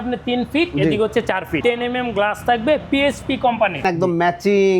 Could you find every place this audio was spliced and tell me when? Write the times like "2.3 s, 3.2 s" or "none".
1.5 s, 3.8 s